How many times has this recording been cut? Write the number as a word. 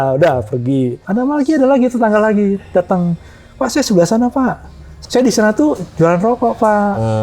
two